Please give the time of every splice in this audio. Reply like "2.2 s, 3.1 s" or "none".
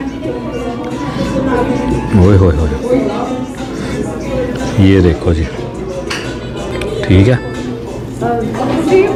none

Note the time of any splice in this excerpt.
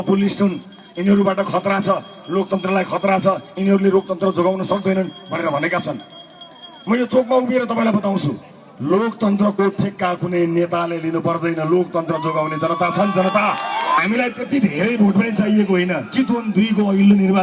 14.0 s

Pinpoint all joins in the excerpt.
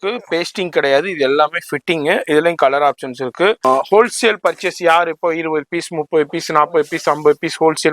3.6 s

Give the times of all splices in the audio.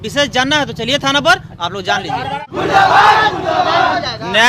2.3 s

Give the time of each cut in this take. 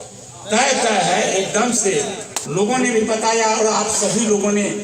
2.3 s

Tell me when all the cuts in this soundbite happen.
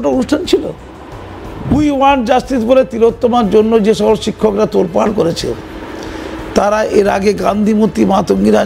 1.5 s

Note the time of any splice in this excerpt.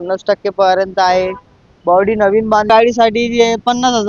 2.7 s

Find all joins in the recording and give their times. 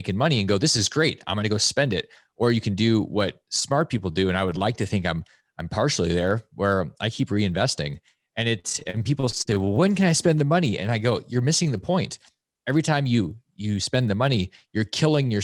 none

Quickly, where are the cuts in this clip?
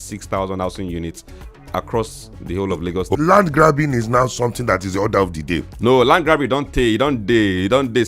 3.1 s

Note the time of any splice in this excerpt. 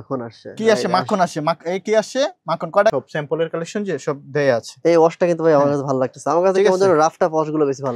2.9 s

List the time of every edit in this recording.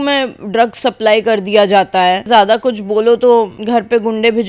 2.3 s, 3.6 s

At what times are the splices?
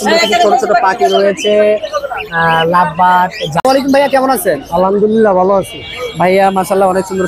3.5 s

